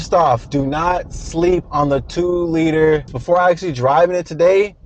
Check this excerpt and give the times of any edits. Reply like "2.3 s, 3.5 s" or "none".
3.2 s